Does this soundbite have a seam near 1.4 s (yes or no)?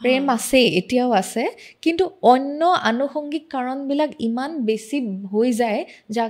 no